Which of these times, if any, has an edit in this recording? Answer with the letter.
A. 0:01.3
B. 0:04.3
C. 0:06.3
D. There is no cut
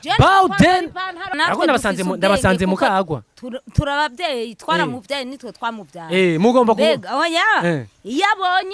A